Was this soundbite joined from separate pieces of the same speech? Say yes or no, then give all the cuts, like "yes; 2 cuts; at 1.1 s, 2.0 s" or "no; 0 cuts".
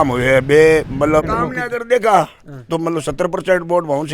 yes; 1 cut; at 1.3 s